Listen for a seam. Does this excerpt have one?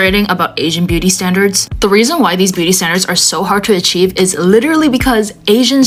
no; 0 cuts

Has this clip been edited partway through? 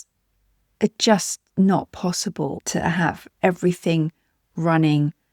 yes; 1 cut; at 2.6 s

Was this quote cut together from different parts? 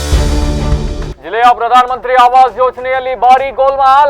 yes; 1 cut; at 1.1 s

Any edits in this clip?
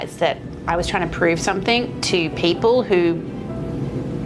no; 0 cuts

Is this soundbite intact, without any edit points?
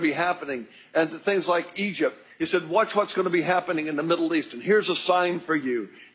no; 1 cut; at 4.2 s

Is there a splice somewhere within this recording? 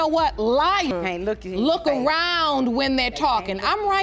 no; 0 cuts

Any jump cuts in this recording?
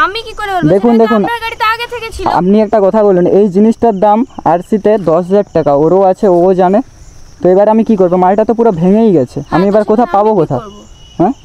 no; 0 cuts

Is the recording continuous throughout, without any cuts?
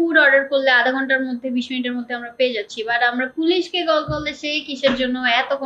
yes; 0 cuts

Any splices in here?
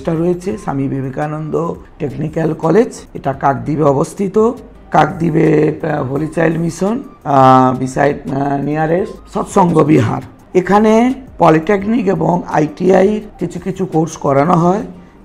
no; 0 cuts

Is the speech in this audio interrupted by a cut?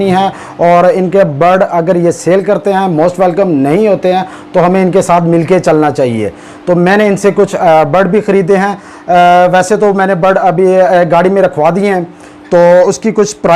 no; 0 cuts

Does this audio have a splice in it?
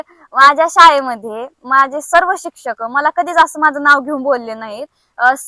no; 0 cuts

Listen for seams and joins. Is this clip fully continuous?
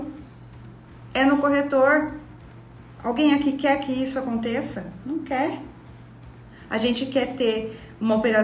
yes; 0 cuts

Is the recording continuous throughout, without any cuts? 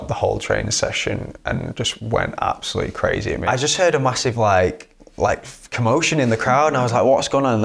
no; 1 cut; at 3.4 s

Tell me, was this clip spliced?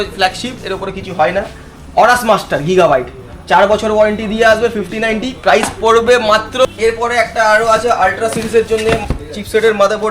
yes; 1 cut; at 6.6 s

